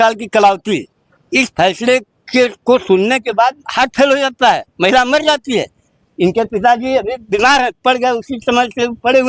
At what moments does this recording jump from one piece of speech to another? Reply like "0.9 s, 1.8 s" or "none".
none